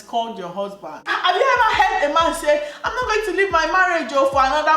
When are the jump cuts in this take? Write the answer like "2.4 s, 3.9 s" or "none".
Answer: 1.1 s